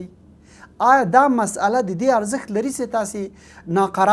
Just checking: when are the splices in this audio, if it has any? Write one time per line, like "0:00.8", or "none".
none